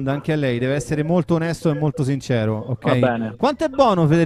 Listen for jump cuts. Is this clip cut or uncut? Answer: uncut